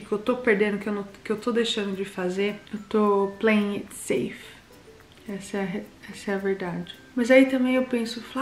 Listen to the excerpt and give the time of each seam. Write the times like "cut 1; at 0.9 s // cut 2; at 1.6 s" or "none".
cut 1; at 2.6 s // cut 2; at 7.0 s